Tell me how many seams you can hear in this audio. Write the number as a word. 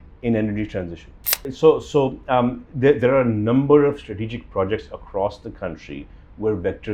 one